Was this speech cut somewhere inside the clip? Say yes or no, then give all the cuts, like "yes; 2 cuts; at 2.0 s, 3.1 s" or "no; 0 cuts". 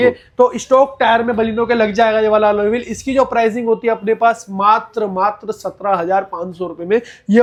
no; 0 cuts